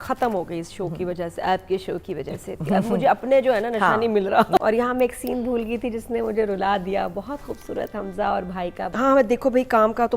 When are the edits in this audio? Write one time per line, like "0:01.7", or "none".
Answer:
0:04.6
0:08.9

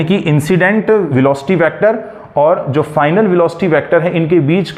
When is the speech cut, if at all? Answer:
none

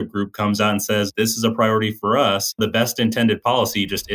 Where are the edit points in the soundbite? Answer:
0:01.1
0:02.6

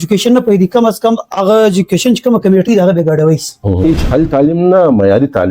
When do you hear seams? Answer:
0:03.8

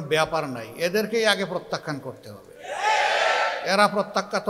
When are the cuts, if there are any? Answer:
none

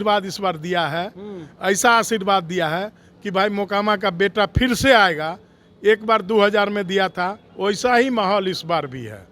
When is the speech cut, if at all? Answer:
0:07.4

